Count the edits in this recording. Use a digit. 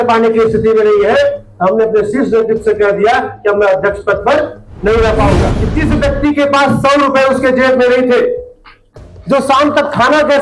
1